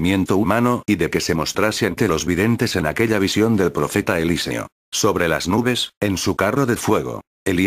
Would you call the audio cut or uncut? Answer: uncut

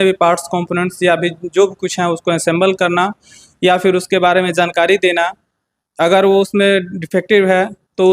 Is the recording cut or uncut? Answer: uncut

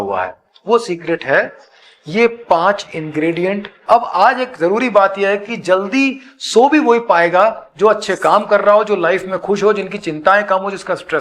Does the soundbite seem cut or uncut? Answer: cut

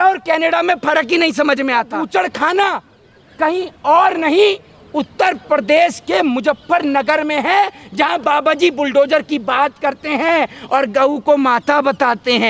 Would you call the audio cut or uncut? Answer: cut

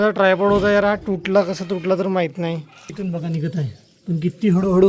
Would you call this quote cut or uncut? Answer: cut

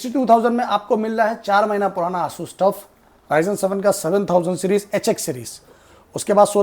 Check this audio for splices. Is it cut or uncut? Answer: uncut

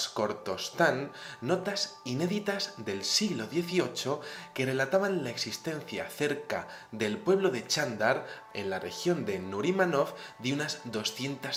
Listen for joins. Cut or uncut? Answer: uncut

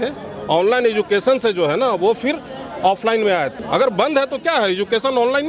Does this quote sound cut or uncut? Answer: cut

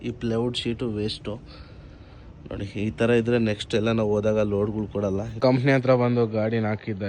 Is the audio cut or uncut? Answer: cut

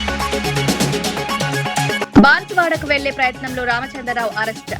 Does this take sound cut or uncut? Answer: cut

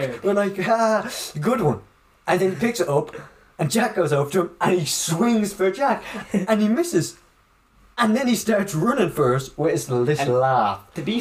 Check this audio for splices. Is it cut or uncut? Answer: uncut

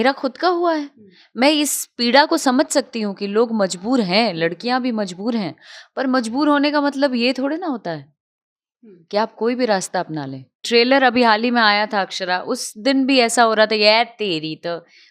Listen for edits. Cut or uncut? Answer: cut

